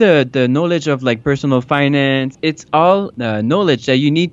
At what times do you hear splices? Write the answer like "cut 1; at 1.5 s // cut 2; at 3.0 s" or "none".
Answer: cut 1; at 2.3 s // cut 2; at 3.1 s